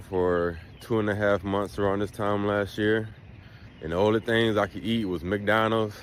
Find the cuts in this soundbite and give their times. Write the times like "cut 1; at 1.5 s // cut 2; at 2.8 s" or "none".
none